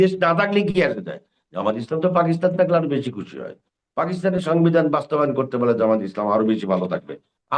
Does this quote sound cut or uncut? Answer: uncut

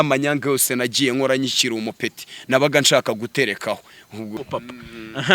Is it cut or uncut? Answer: cut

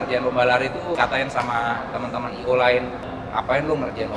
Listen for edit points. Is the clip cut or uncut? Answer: cut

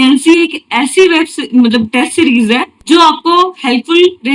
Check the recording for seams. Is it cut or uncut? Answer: cut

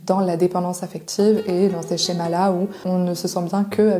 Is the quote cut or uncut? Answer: uncut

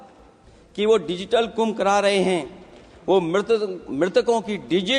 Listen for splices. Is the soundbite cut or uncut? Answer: uncut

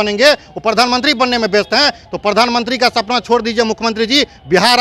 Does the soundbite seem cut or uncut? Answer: uncut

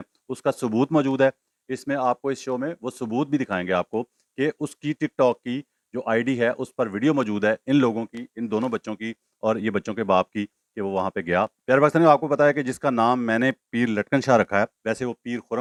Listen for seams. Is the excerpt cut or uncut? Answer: uncut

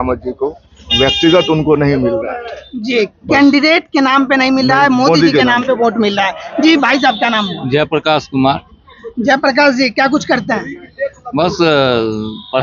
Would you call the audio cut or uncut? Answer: uncut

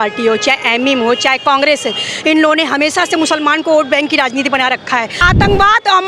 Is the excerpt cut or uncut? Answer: cut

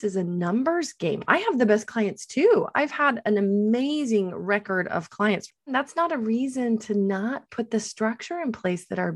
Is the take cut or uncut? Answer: cut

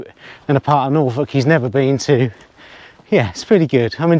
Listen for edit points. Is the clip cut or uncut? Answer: uncut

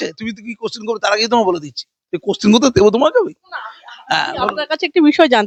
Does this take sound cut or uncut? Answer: uncut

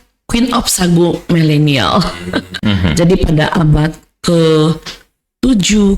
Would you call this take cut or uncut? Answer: cut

